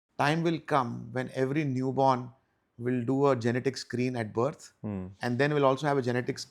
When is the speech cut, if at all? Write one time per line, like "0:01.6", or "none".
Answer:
none